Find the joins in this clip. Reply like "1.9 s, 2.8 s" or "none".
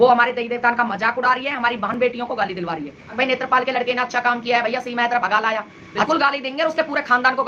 3.0 s, 6.1 s